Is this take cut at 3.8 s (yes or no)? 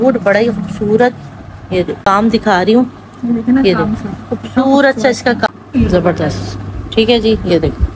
no